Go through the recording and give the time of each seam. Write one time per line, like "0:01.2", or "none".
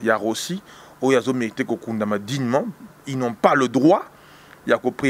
none